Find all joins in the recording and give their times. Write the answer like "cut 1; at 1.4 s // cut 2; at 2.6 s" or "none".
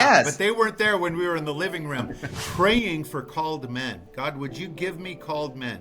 cut 1; at 2.2 s